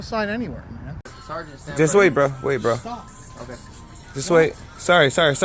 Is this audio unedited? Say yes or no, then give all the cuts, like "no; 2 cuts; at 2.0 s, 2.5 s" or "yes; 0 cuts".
no; 1 cut; at 1.2 s